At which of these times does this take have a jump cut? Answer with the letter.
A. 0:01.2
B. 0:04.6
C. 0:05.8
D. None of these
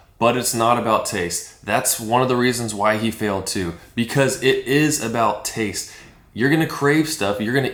D